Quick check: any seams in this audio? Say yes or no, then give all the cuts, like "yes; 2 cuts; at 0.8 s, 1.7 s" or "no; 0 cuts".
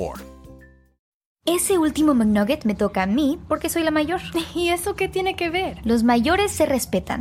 yes; 1 cut; at 1.2 s